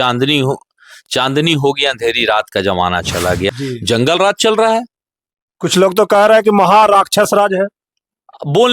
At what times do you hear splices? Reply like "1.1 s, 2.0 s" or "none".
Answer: 3.5 s